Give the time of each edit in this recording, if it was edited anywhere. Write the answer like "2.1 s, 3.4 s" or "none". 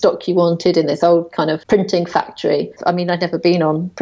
1.6 s, 2.8 s